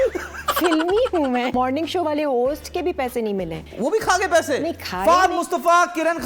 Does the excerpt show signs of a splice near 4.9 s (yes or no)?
no